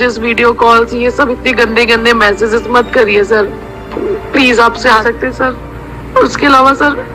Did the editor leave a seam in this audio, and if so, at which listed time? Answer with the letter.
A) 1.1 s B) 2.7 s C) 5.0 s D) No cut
C